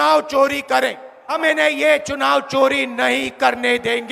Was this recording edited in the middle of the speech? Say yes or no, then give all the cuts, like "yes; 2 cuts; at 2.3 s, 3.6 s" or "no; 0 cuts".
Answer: yes; 1 cut; at 1.4 s